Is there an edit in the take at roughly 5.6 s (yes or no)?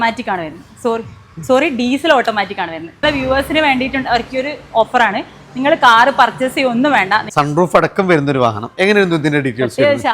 no